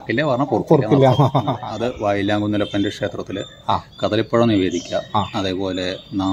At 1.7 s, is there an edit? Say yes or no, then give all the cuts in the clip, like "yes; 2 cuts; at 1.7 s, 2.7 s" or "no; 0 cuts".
yes; 1 cut; at 1.7 s